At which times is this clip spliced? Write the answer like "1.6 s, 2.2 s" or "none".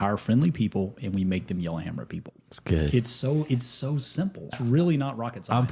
4.5 s

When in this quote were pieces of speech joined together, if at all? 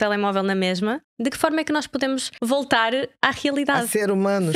1.1 s, 2.3 s

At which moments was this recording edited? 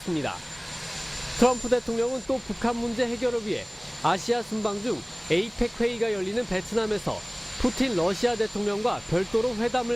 4.2 s

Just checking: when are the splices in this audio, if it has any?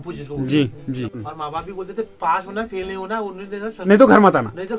1.2 s

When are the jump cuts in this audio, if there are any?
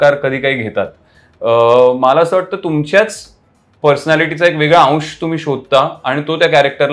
none

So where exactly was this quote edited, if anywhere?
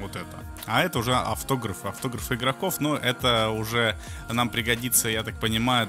0.9 s

